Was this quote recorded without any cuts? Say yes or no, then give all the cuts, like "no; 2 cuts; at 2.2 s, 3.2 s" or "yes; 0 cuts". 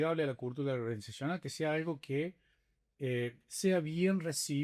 yes; 0 cuts